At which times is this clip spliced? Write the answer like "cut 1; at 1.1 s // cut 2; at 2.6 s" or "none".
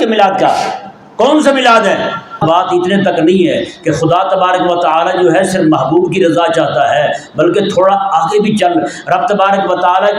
cut 1; at 2.4 s